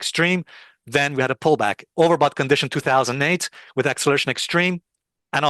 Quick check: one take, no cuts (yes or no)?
yes